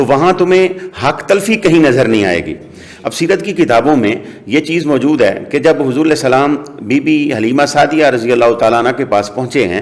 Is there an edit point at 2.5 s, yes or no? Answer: no